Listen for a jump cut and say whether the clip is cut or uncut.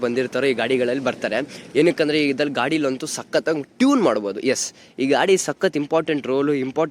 uncut